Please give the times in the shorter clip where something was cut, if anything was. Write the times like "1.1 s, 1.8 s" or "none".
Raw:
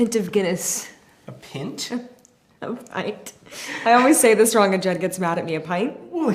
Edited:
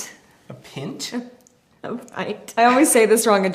2.5 s